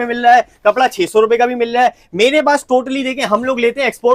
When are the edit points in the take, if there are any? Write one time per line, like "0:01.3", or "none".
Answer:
none